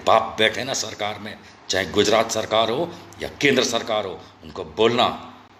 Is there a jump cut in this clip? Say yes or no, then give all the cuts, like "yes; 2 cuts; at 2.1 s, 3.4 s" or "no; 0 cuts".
no; 0 cuts